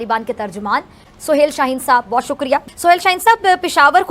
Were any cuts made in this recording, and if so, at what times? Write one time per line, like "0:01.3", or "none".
none